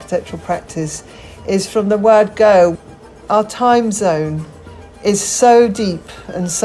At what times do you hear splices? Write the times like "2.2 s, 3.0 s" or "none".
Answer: 3.2 s